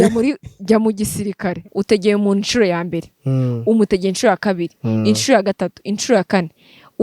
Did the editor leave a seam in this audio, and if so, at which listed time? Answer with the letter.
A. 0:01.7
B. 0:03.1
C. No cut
A